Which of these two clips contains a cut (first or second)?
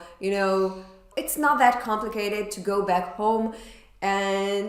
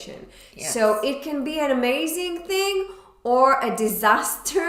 first